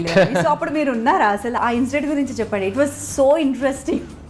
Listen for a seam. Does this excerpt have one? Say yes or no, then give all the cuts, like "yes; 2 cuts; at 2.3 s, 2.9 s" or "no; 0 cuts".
yes; 1 cut; at 1.6 s